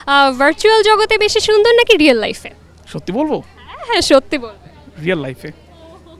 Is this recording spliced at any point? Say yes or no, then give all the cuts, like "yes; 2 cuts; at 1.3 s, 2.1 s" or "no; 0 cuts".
no; 0 cuts